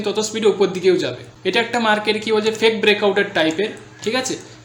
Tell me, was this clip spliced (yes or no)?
yes